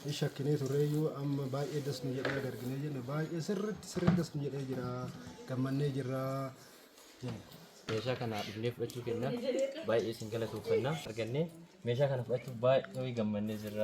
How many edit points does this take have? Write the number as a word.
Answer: two